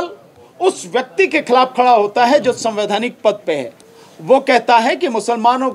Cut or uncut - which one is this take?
cut